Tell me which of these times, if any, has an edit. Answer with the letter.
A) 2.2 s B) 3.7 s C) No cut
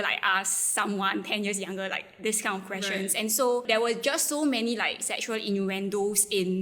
B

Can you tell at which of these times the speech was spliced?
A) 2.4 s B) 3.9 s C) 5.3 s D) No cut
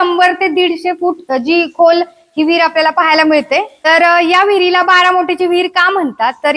B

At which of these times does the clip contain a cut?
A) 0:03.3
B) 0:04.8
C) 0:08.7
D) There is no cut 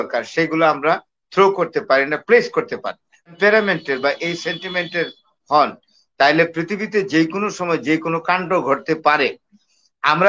A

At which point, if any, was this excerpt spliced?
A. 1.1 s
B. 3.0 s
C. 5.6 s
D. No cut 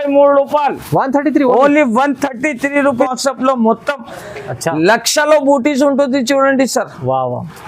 B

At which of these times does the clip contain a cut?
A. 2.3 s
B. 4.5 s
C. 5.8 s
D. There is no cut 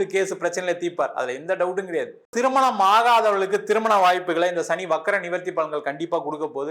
A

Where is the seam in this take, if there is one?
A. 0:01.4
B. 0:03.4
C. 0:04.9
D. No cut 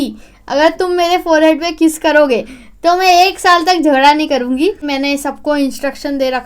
C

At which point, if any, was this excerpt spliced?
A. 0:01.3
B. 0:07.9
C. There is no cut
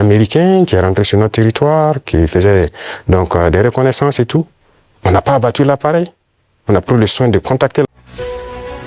B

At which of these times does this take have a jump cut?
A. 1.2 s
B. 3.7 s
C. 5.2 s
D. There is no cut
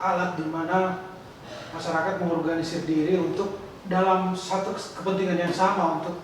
B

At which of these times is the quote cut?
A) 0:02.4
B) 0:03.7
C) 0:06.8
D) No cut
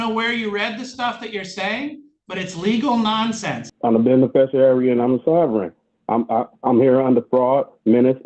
B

